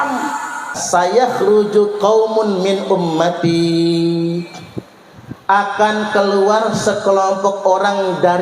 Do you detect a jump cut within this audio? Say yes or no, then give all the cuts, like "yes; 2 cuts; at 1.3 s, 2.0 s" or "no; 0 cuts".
yes; 1 cut; at 1.1 s